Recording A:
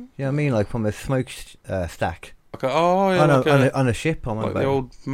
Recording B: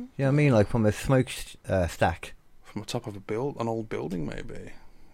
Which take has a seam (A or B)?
A